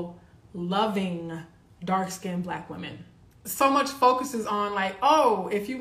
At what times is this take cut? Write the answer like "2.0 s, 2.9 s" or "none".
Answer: 3.4 s